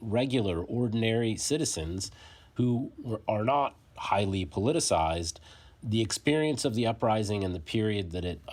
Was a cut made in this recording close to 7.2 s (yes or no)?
no